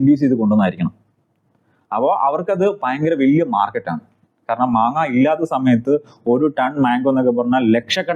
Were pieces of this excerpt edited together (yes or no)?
no